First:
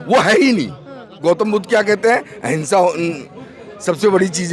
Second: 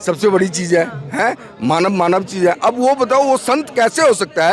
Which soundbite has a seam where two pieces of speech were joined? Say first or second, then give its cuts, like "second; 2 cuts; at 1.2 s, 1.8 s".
first; 1 cut; at 1.1 s